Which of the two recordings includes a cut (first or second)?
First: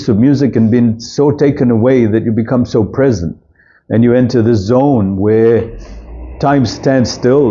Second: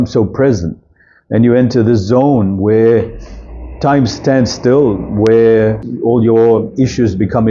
second